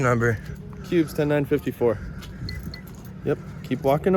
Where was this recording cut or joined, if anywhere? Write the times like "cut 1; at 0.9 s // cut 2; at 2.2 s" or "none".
none